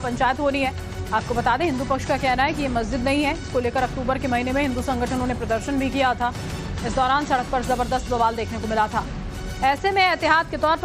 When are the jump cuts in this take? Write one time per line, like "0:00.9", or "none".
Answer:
0:02.0